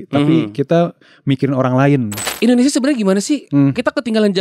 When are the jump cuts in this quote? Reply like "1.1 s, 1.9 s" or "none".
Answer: 2.2 s